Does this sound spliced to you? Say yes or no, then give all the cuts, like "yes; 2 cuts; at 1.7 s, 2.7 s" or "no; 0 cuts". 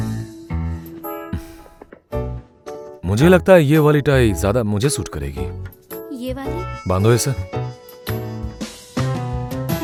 no; 0 cuts